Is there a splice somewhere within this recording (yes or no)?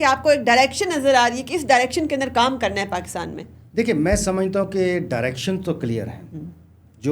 no